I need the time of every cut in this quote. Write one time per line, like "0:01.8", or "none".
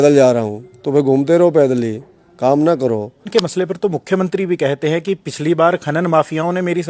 0:03.3